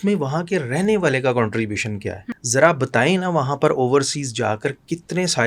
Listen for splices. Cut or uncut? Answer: cut